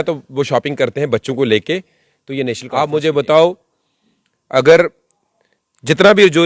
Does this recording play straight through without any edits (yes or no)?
no